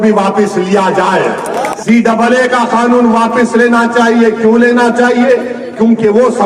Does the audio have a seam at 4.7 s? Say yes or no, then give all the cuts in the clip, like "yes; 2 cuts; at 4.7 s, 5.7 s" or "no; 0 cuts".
no; 1 cut; at 1.7 s